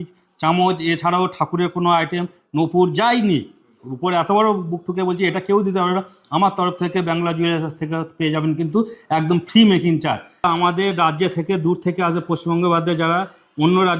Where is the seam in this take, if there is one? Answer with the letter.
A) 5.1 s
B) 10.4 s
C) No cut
B